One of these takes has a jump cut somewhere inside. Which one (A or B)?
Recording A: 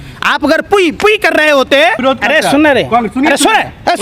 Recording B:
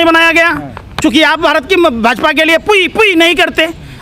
A